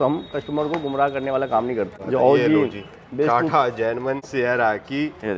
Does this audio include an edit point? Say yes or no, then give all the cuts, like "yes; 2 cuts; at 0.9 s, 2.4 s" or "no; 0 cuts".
yes; 2 cuts; at 1.9 s, 4.2 s